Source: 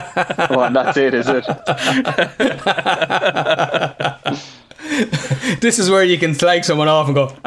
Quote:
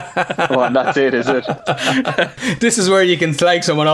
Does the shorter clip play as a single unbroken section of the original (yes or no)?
no